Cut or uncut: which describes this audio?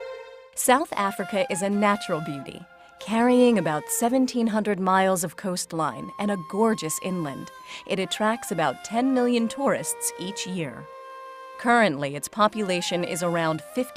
cut